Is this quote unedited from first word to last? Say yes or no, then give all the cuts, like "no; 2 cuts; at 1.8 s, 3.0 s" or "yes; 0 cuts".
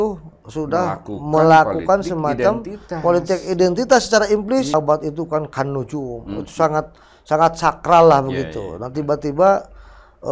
no; 1 cut; at 4.7 s